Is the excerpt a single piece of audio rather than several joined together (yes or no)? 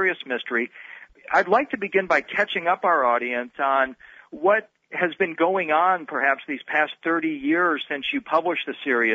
yes